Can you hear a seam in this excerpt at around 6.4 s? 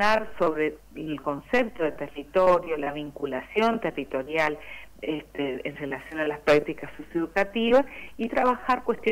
no; 0 cuts

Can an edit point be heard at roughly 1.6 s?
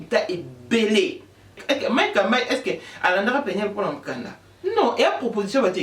yes; 1 cut; at 1.6 s

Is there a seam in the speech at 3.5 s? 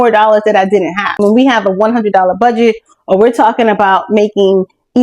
no; 1 cut; at 1.1 s

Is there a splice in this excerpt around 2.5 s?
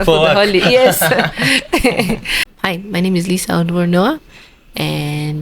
yes; 1 cut; at 2.5 s

